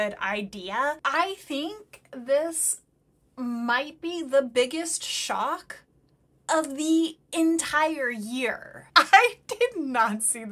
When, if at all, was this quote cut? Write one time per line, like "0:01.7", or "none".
0:01.0